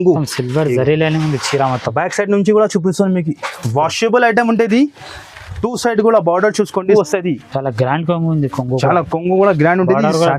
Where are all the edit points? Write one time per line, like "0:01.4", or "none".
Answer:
0:06.9